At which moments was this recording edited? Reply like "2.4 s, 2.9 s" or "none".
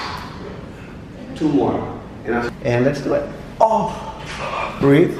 2.5 s